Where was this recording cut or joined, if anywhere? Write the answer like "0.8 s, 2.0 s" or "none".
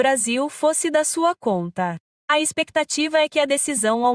2.1 s